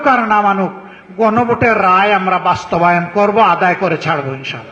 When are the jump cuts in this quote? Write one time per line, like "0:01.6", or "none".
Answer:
none